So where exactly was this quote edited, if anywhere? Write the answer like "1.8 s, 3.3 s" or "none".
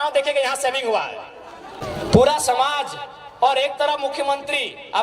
1.8 s